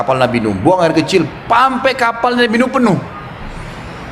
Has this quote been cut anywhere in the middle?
no; 0 cuts

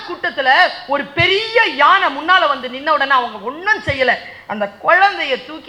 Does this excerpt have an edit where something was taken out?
no; 0 cuts

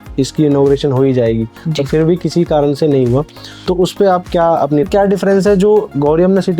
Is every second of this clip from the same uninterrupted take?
no; 1 cut; at 4.9 s

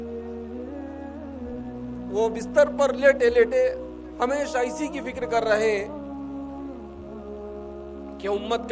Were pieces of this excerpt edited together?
no; 0 cuts

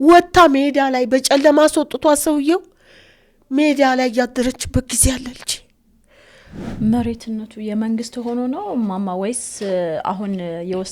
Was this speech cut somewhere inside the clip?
yes; 1 cut; at 6.6 s

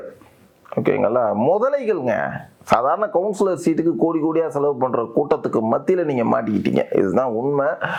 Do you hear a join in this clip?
no; 0 cuts

